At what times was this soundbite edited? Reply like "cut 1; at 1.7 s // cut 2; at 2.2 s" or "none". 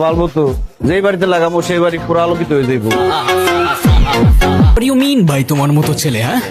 cut 1; at 4.8 s